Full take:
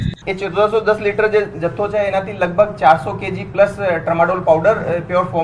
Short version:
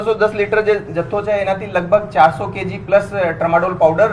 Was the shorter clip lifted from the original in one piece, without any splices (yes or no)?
yes